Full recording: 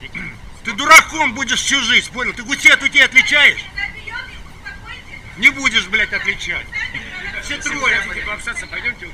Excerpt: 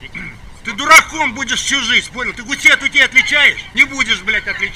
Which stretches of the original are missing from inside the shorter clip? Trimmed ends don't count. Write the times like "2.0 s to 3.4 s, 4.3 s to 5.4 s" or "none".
3.6 s to 5.3 s